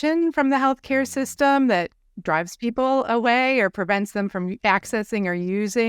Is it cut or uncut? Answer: uncut